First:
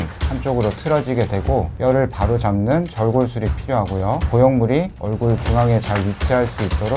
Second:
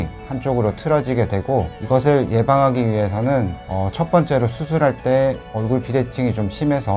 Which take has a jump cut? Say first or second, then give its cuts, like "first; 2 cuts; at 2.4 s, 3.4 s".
first; 1 cut; at 1.8 s